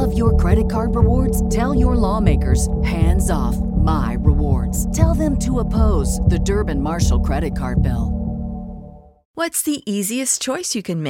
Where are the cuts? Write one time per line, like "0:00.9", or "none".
0:09.2